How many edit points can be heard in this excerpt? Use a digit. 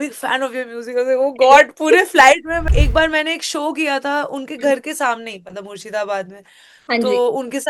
1